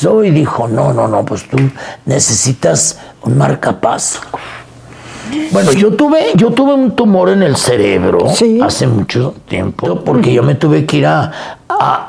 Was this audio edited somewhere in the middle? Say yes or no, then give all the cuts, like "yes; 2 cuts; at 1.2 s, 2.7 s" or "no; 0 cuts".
yes; 2 cuts; at 5.4 s, 9.8 s